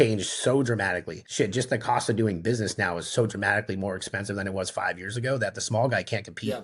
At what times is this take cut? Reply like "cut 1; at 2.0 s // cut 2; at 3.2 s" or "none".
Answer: cut 1; at 1.2 s